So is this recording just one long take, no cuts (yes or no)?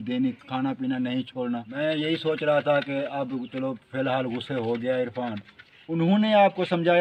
no